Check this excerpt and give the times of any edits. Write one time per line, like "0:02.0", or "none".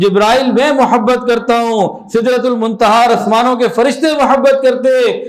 none

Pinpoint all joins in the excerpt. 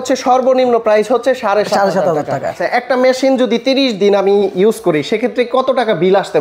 0:02.6

